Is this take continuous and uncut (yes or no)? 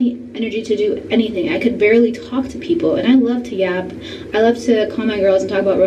yes